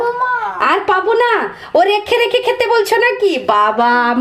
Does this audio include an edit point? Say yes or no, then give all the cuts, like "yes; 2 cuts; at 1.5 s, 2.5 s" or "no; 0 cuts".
no; 0 cuts